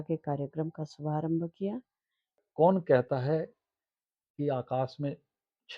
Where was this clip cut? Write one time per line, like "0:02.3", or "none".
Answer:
0:02.2